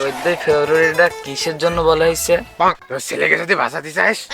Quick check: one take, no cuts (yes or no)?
no